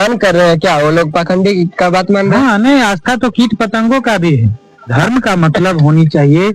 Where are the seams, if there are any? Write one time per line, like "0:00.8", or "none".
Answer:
0:04.8